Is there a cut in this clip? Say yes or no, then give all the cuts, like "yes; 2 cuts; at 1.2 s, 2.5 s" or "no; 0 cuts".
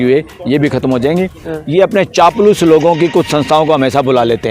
yes; 1 cut; at 1.5 s